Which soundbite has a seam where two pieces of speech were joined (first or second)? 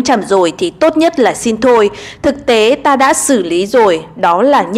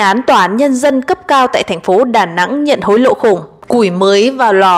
second